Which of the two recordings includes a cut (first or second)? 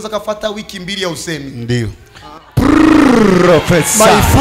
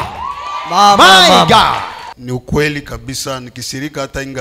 second